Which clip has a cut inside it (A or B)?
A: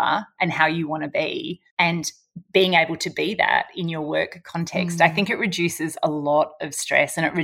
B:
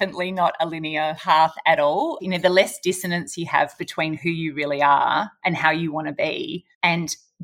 B